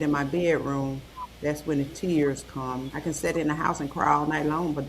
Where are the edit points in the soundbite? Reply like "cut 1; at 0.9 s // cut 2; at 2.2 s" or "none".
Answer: cut 1; at 2.8 s